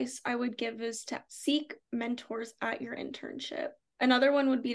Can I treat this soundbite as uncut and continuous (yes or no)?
no